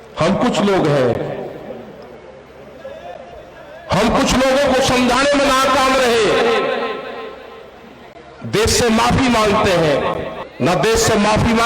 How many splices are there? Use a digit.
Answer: 1